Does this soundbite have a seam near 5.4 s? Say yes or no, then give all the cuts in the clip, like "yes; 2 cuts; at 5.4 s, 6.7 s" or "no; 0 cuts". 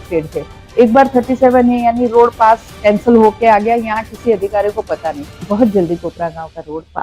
yes; 1 cut; at 5.4 s